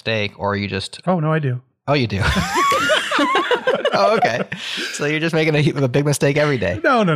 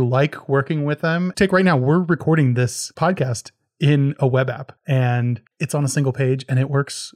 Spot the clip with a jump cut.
second; 4 cuts; at 1.3 s, 2.8 s, 4.7 s, 5.5 s

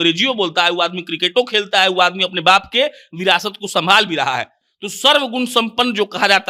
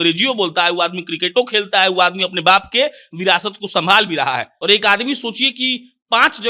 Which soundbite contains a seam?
second; 1 cut; at 4.5 s

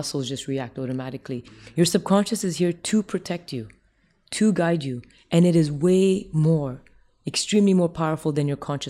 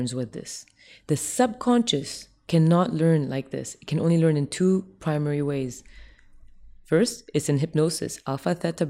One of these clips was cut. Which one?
first; 1 cut; at 1.6 s

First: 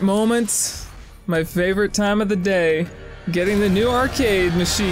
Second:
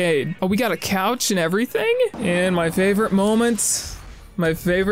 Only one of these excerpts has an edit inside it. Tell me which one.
second; 1 cut; at 2.1 s

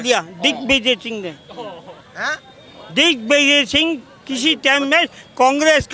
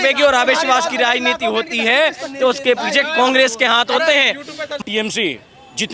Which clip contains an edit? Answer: second; 1 cut; at 4.8 s

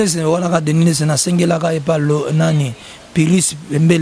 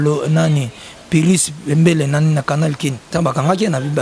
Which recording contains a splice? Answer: second; 1 cut; at 3.0 s

